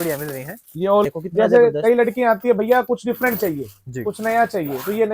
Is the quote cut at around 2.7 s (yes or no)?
no